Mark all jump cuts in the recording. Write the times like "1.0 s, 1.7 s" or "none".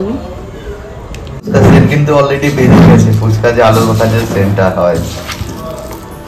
1.5 s